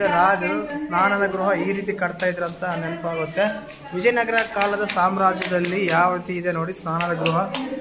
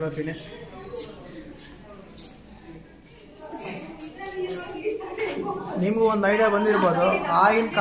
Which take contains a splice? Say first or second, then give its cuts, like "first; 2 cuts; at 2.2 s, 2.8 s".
second; 1 cut; at 3.3 s